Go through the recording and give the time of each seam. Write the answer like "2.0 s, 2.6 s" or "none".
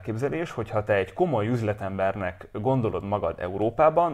none